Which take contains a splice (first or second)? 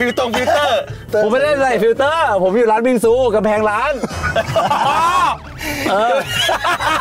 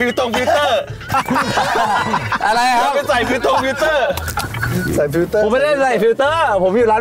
first